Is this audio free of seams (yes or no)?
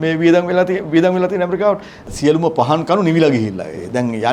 no